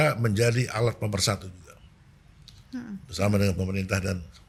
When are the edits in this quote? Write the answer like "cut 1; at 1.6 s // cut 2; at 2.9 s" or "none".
none